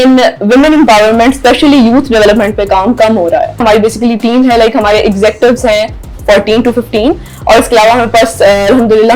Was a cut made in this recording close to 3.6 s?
yes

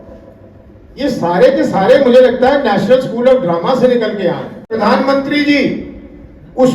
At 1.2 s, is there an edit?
no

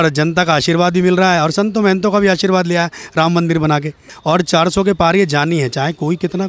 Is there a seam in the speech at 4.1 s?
yes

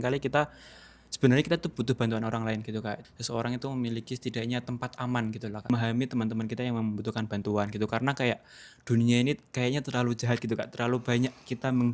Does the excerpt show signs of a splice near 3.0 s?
yes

